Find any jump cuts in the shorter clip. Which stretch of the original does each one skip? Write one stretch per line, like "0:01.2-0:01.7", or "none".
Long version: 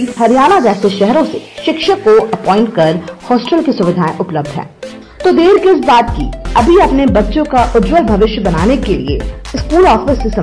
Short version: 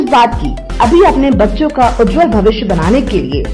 none